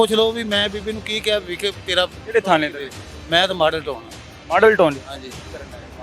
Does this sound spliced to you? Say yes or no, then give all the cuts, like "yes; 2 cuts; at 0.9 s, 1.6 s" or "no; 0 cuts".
no; 0 cuts